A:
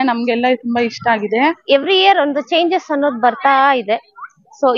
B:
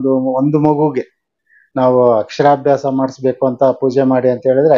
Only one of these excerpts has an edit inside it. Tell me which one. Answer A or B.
A